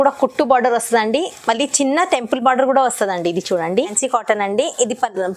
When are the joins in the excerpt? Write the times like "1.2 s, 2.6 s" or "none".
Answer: 4.0 s